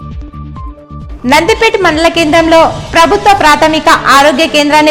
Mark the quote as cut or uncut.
cut